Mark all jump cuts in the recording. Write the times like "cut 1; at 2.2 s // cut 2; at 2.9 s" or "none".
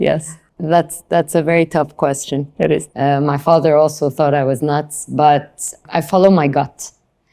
cut 1; at 2.9 s // cut 2; at 5.8 s